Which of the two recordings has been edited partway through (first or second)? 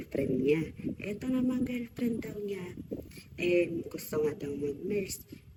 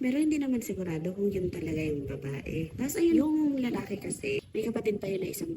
second